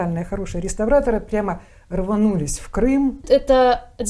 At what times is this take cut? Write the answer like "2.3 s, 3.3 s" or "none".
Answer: 3.2 s